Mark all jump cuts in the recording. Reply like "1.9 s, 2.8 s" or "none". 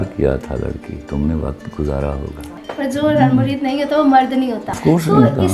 0.9 s, 2.4 s, 4.8 s